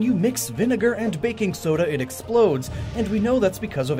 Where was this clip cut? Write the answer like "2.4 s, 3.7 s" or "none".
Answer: none